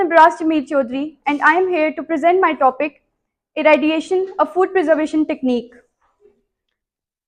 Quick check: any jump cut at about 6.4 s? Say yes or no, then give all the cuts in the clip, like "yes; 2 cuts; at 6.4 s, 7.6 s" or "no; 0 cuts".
yes; 1 cut; at 6.4 s